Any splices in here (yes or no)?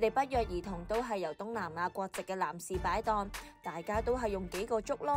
no